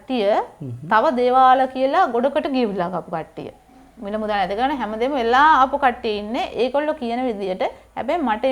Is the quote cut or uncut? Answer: uncut